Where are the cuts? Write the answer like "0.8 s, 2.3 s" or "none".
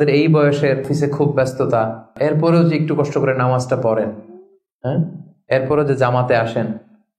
0.9 s, 2.1 s